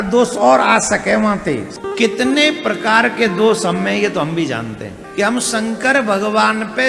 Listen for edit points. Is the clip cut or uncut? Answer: cut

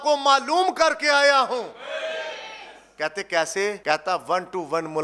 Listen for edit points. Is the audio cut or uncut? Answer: cut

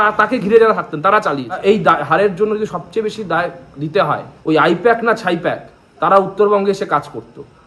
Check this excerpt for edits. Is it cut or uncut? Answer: cut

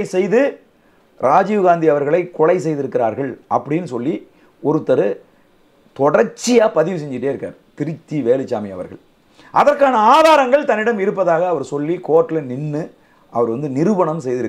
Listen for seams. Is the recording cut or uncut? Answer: uncut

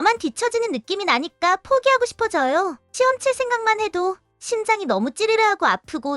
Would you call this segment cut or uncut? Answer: cut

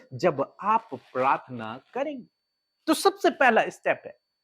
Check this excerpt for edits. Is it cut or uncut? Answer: uncut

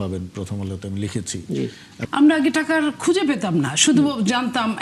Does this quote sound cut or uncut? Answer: cut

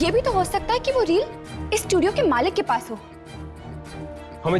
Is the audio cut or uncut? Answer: uncut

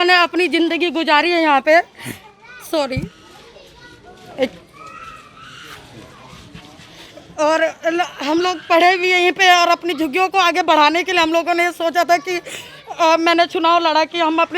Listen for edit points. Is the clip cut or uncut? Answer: uncut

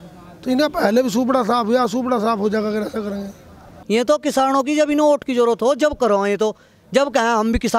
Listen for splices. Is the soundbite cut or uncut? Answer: cut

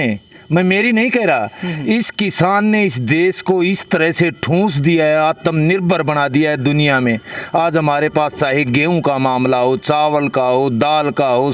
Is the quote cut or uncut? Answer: uncut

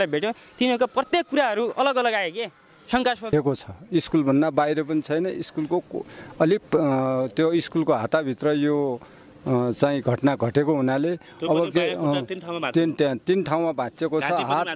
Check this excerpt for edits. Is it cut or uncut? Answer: cut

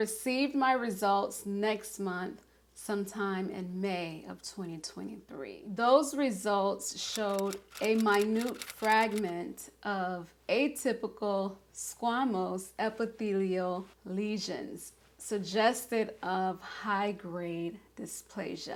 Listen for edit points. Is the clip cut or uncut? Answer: uncut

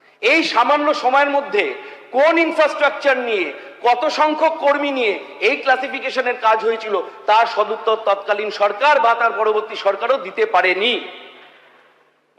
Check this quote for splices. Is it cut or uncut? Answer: uncut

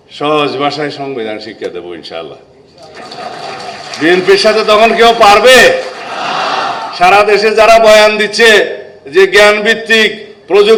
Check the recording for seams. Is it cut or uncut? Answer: uncut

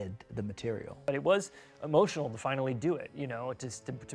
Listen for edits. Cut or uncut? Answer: cut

